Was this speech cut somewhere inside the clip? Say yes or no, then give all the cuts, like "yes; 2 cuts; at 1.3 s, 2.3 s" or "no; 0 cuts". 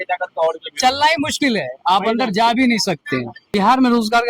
yes; 1 cut; at 3.4 s